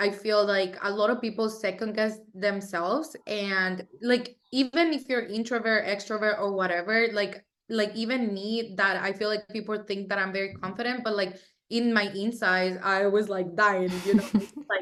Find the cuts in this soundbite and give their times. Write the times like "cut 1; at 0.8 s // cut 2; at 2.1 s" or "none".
none

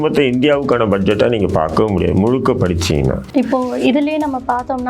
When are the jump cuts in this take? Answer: cut 1; at 3.2 s

